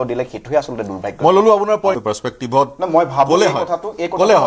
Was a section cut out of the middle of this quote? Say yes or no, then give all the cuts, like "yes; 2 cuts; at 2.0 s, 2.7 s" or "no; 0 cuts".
yes; 1 cut; at 2.0 s